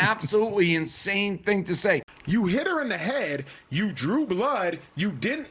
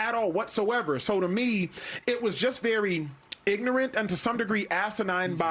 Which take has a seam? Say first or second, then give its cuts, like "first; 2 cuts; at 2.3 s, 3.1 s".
first; 1 cut; at 2.1 s